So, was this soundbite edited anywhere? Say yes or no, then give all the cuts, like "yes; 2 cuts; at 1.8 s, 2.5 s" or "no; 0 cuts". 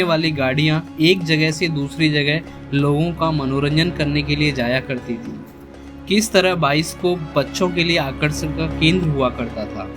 yes; 1 cut; at 5.5 s